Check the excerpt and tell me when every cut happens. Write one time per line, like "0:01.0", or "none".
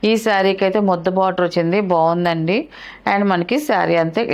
none